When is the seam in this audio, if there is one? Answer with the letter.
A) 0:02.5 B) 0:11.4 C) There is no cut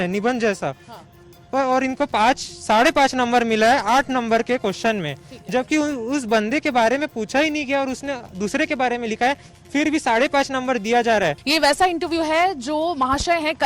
B